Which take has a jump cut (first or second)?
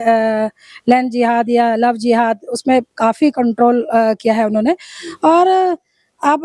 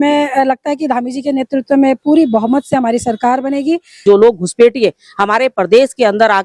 second